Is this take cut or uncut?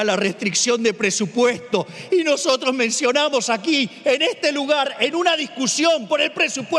uncut